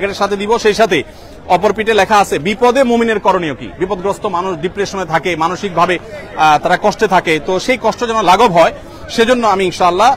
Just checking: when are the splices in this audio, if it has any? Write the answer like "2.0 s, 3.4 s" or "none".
none